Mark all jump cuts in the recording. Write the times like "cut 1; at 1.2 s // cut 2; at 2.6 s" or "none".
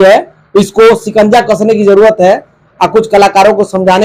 none